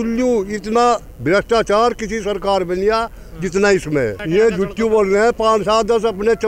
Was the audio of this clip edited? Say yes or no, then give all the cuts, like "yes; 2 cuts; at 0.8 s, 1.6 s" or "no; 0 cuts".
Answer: no; 0 cuts